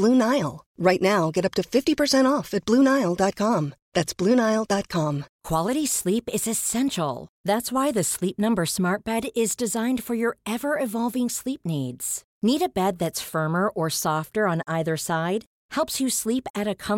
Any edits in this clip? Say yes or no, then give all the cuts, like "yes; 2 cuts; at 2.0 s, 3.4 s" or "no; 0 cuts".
yes; 1 cut; at 5.3 s